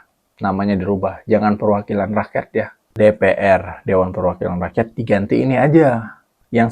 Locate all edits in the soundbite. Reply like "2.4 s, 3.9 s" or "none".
2.8 s

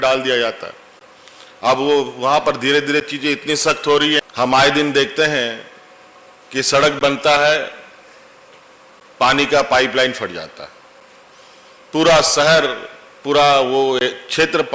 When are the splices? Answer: 4.2 s

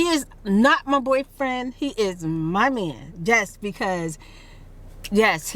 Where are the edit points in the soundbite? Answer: none

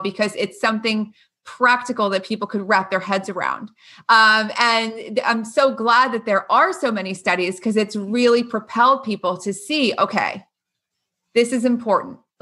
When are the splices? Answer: none

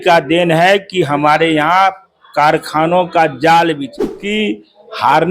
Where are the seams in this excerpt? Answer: 4.3 s

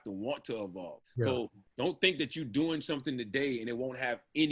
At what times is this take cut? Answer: 1.0 s

